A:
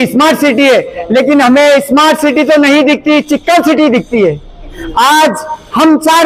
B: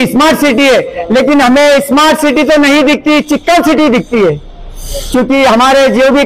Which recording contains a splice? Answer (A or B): A